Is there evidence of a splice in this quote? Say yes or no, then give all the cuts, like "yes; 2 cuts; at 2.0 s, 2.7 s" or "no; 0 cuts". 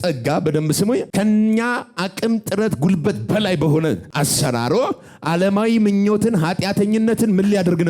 yes; 2 cuts; at 1.1 s, 4.1 s